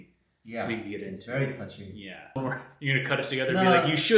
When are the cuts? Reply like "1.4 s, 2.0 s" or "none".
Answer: 2.4 s